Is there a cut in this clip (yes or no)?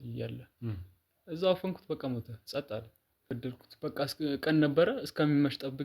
yes